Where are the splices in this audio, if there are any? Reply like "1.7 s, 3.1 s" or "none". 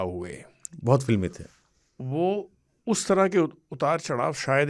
none